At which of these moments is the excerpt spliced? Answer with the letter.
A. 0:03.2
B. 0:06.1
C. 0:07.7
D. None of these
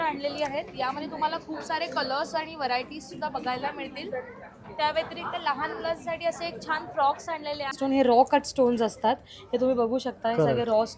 C